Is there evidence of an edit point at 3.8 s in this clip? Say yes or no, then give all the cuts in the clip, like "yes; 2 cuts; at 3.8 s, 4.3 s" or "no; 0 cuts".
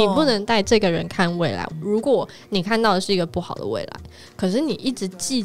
no; 1 cut; at 1.6 s